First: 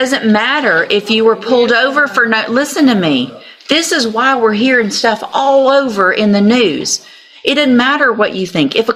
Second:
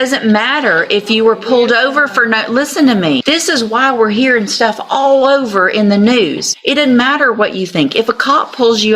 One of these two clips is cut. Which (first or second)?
second